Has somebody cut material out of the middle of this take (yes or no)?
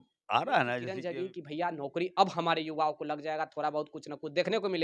yes